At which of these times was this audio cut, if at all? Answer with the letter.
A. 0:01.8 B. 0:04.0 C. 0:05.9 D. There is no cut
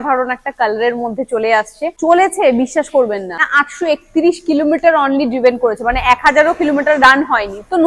A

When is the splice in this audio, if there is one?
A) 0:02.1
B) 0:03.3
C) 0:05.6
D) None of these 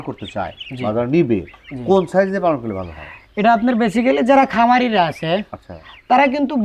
D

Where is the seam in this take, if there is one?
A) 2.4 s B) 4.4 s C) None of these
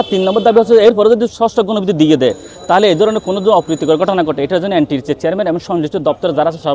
C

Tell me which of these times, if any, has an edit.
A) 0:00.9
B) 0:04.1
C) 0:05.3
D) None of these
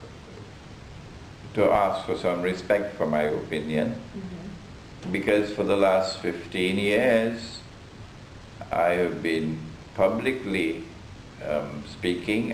C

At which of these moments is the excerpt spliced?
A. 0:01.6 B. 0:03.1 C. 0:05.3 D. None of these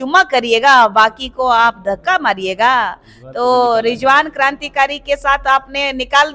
D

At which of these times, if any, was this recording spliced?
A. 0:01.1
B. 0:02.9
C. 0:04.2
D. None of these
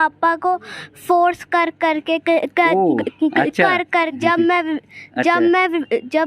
C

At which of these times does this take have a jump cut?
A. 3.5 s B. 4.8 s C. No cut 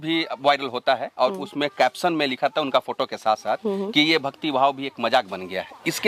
C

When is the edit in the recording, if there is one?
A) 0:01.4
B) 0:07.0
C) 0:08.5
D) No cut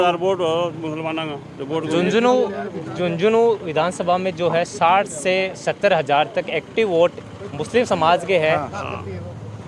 D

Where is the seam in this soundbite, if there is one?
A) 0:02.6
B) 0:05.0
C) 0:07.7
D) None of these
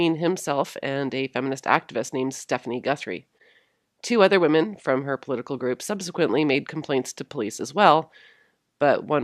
A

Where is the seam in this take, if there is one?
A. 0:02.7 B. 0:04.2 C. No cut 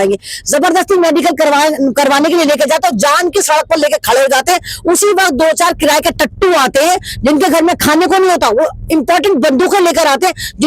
C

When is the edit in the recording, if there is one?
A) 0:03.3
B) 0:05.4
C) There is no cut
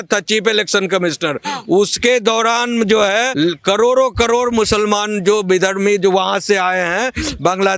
A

